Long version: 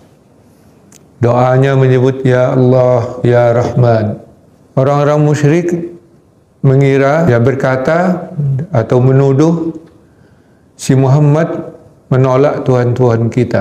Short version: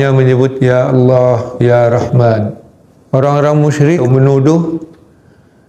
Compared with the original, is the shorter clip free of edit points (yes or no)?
no